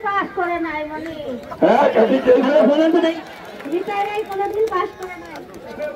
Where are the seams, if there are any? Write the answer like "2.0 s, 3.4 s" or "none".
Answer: none